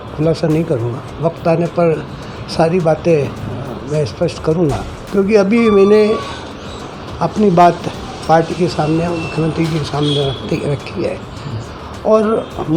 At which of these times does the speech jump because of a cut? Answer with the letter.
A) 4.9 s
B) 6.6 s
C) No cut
A